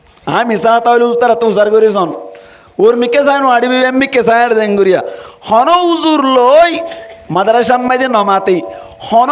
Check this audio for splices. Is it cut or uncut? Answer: uncut